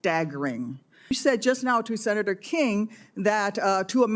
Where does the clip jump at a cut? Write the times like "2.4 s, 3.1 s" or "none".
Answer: 1.1 s